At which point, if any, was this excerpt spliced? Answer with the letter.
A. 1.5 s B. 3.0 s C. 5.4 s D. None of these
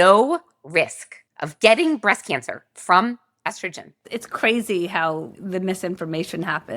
C